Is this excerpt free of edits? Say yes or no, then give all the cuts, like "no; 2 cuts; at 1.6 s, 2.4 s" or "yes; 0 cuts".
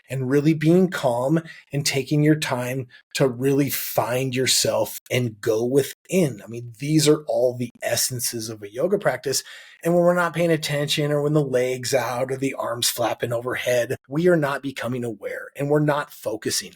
no; 1 cut; at 14.0 s